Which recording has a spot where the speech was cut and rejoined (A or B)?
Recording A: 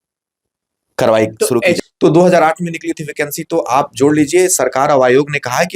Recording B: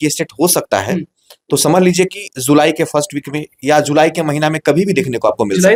A